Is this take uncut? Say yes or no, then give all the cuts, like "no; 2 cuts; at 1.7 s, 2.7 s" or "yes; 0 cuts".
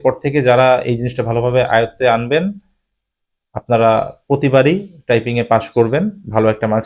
yes; 0 cuts